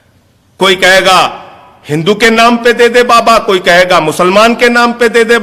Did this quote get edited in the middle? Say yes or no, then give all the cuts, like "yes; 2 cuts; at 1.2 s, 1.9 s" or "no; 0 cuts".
no; 0 cuts